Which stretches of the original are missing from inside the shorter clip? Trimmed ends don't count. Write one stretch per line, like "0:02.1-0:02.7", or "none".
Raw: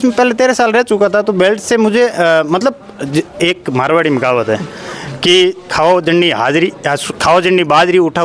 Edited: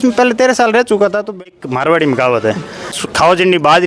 0:01.3-0:03.3
0:05.1-0:07.1